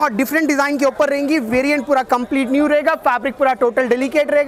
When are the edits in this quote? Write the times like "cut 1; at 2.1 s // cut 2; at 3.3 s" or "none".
none